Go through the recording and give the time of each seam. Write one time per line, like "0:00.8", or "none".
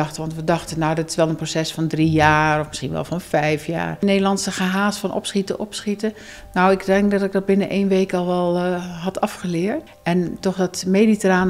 0:04.0
0:09.9